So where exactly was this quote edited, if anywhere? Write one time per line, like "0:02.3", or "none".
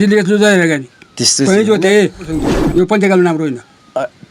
0:02.3